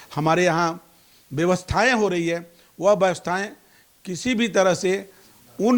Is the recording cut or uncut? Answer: uncut